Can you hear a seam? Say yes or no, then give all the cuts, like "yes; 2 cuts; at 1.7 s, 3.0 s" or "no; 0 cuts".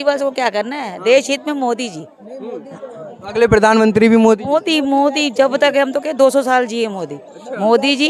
no; 0 cuts